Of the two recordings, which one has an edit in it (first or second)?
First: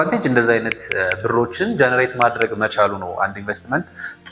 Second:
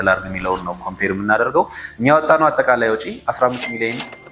second